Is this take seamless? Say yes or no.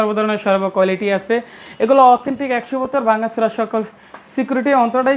yes